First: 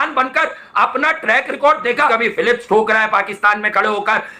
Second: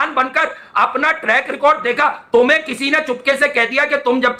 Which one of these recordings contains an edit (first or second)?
first